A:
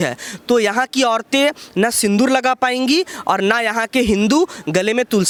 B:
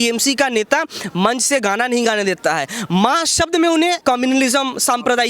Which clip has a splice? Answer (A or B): B